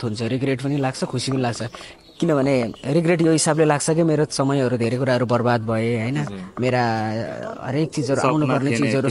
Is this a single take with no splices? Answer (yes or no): yes